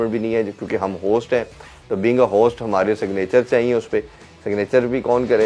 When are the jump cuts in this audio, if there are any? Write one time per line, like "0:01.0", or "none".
none